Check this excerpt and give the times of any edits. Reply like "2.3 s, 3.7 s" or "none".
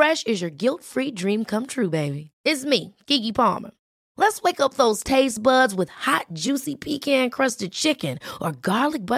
none